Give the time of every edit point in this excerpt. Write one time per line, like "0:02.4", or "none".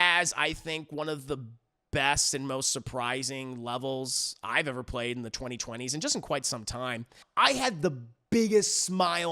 0:07.2